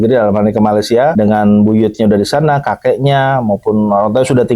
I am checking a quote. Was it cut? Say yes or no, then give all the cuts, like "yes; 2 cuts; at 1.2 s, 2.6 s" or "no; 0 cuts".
yes; 1 cut; at 1.1 s